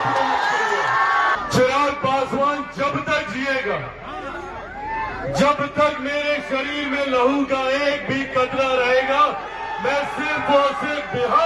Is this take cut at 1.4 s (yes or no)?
yes